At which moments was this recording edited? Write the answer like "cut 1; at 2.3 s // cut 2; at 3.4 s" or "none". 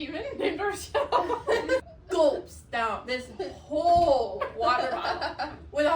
cut 1; at 1.9 s